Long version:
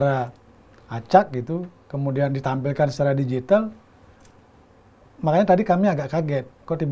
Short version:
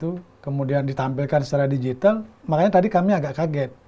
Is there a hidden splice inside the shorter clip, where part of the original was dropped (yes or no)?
yes